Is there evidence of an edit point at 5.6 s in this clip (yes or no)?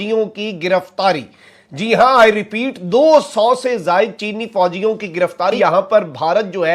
yes